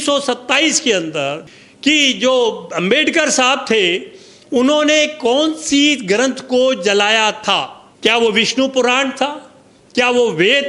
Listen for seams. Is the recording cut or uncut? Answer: cut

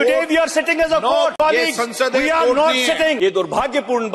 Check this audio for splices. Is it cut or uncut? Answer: cut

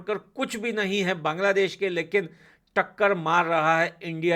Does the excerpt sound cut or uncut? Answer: uncut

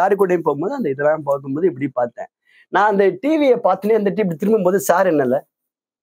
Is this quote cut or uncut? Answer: uncut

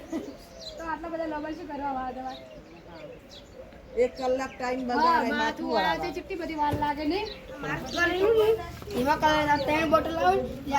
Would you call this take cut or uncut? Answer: cut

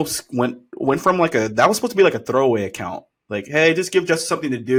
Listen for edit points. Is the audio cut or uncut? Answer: uncut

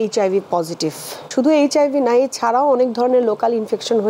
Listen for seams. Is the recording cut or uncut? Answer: cut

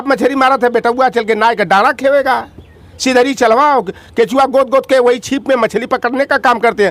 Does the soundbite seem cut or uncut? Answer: uncut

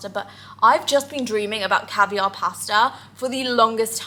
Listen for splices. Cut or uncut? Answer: uncut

